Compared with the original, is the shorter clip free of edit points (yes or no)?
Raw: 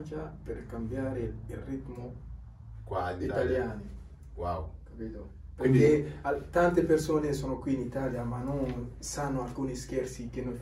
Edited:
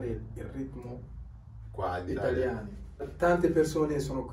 no